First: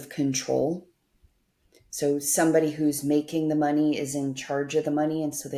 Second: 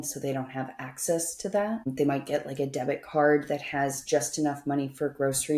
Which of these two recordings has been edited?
second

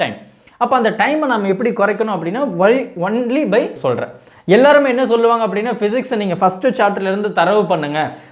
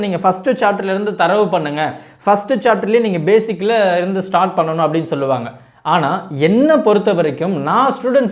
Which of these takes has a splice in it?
first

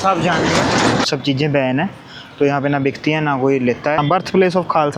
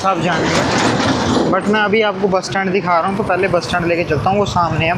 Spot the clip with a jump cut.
first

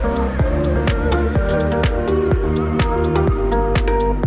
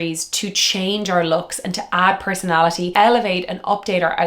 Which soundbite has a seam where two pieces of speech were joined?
second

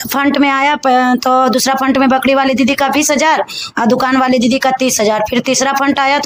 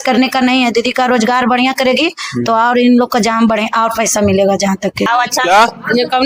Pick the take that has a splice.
second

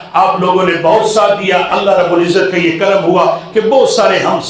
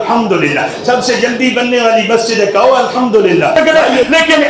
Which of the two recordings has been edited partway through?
second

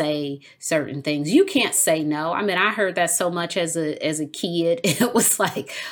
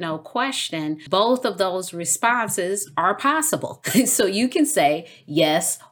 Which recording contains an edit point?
second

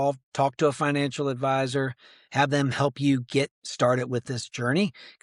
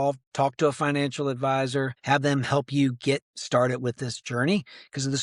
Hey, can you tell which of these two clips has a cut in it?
second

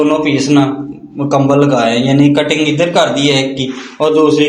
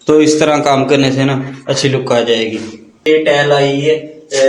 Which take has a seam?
second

